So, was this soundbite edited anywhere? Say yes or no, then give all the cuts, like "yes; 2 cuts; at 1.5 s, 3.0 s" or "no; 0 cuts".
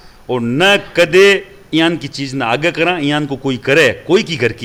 no; 0 cuts